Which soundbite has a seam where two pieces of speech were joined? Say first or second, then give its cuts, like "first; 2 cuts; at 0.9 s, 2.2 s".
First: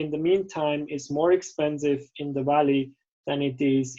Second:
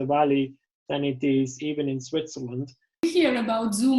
second; 1 cut; at 3.0 s